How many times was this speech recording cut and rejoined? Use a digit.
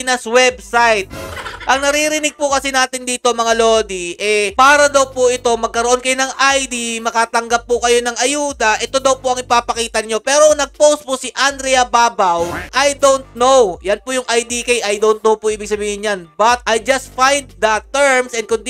0